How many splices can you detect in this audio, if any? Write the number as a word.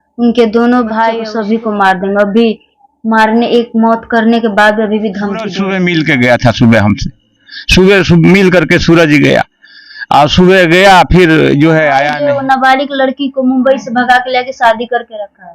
three